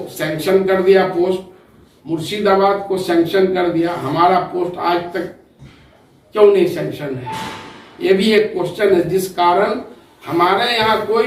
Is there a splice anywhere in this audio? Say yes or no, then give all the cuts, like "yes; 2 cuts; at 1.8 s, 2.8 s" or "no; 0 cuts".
no; 0 cuts